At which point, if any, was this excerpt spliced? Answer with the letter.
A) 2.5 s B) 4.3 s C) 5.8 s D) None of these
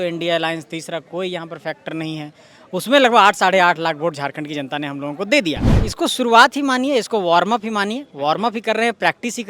C